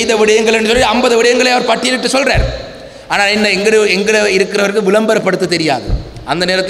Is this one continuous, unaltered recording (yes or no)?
yes